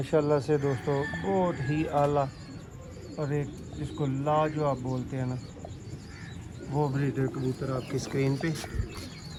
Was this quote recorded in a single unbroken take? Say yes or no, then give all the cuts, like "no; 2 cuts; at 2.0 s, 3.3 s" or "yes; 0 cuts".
yes; 0 cuts